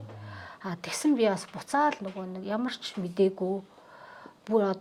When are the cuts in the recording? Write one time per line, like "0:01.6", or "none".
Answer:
none